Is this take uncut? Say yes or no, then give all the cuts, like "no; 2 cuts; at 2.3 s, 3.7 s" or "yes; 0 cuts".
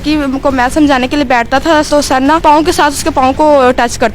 no; 1 cut; at 2.1 s